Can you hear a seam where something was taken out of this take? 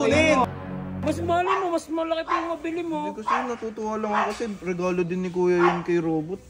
yes; 1 cut; at 0.9 s

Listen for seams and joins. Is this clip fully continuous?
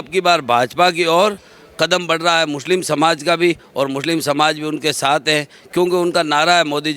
yes; 0 cuts

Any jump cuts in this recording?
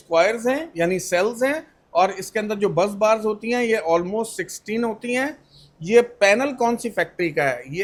no; 0 cuts

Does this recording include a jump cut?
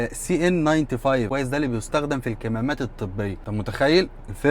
yes; 2 cuts; at 1.3 s, 3.4 s

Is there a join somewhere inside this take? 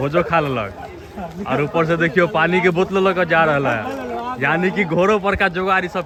no; 0 cuts

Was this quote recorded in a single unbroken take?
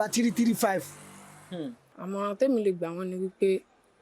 no; 1 cut; at 1.9 s

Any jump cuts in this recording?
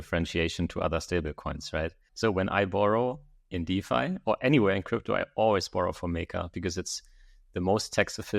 yes; 1 cut; at 2.1 s

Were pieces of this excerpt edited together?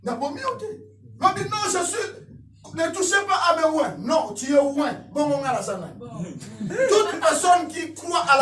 no; 0 cuts

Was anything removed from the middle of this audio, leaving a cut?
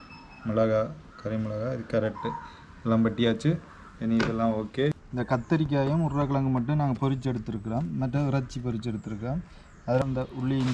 yes; 2 cuts; at 4.9 s, 10.0 s

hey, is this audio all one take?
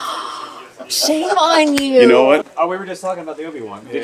no; 1 cut; at 2.4 s

